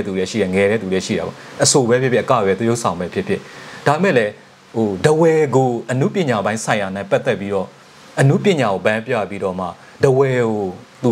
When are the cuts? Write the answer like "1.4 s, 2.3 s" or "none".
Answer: none